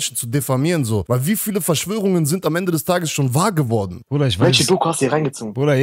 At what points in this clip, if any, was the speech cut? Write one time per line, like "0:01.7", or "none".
0:01.0
0:04.0